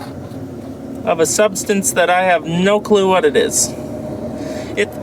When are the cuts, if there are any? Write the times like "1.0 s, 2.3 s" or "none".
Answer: none